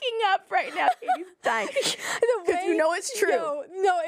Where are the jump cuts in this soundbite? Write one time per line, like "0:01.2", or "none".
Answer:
none